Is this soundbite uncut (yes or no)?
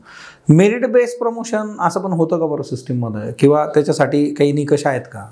yes